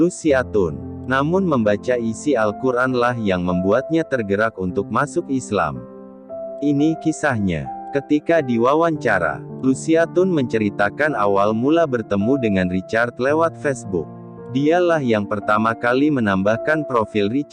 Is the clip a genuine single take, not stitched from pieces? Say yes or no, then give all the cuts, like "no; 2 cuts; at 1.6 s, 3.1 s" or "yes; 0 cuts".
yes; 0 cuts